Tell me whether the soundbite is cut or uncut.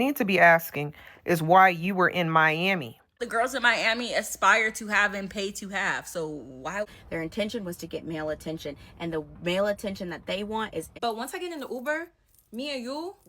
cut